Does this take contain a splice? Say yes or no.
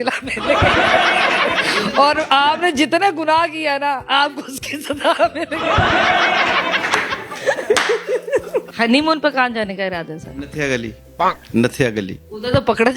yes